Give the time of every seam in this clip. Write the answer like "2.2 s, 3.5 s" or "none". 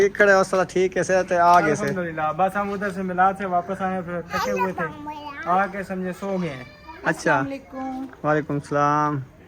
none

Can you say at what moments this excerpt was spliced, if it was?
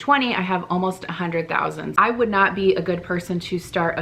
1.9 s

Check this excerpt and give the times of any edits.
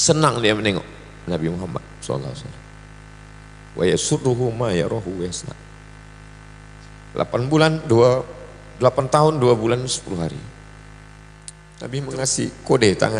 11.6 s

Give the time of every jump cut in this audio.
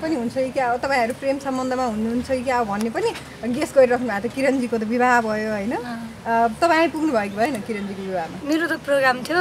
none

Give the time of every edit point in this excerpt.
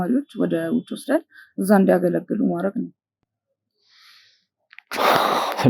none

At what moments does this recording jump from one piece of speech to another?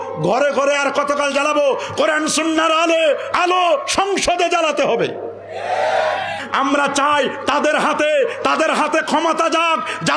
6.4 s

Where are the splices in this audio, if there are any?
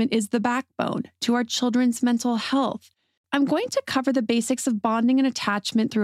3.2 s

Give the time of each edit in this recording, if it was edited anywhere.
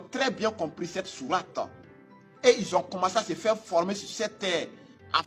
none

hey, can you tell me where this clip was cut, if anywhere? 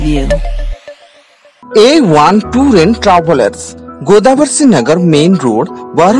1.6 s

